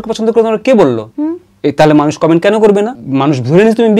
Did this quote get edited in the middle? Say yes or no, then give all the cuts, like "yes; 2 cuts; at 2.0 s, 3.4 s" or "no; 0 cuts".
yes; 2 cuts; at 1.1 s, 3.0 s